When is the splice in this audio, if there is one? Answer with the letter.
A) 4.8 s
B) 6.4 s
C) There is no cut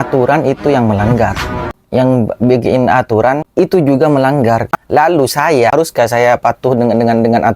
A